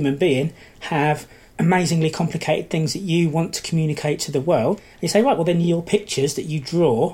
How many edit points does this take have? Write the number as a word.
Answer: two